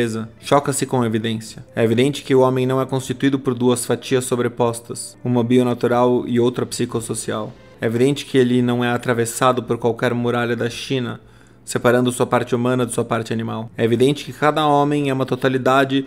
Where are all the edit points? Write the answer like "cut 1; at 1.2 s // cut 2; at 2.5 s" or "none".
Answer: none